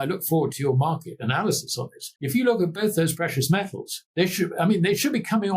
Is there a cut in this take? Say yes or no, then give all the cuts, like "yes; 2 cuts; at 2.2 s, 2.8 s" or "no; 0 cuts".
yes; 1 cut; at 2.1 s